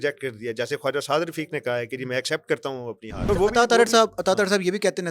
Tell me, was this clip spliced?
yes; 1 cut; at 3.2 s

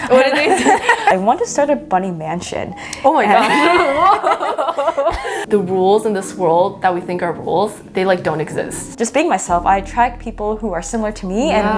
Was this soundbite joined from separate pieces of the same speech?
yes; 3 cuts; at 1.1 s, 5.3 s, 8.9 s

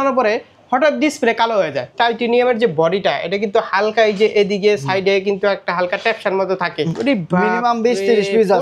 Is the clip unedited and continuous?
no; 2 cuts; at 1.9 s, 6.9 s

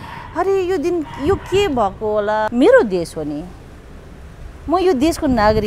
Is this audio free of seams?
no; 1 cut; at 2.5 s

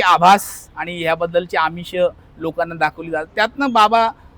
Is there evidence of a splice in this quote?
no; 0 cuts

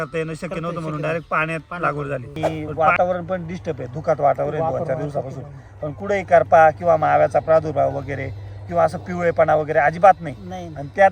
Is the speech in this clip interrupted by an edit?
yes; 1 cut; at 2.3 s

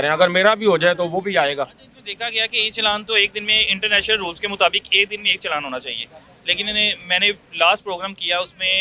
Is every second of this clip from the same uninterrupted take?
yes; 0 cuts

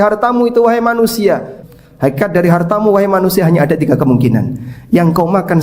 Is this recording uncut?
no; 1 cut; at 1.6 s

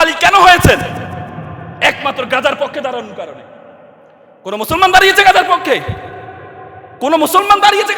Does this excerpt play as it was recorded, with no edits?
yes; 0 cuts

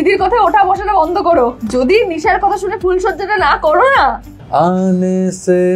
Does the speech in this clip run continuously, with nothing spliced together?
no; 2 cuts; at 1.6 s, 4.3 s

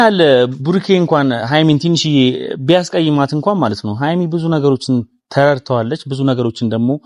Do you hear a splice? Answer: no; 0 cuts

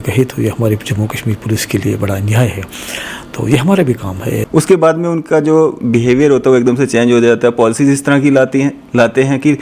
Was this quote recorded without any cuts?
no; 1 cut; at 4.4 s

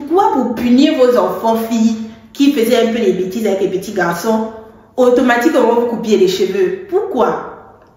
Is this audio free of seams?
yes; 0 cuts

